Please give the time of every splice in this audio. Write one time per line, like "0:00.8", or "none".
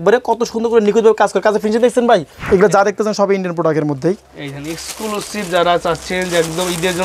0:02.4